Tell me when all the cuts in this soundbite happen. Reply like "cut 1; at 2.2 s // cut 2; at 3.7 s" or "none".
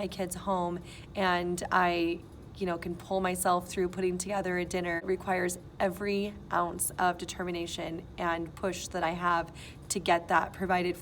cut 1; at 5.0 s